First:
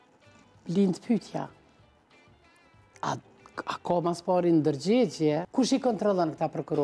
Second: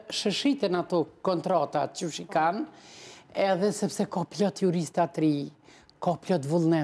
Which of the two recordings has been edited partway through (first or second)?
first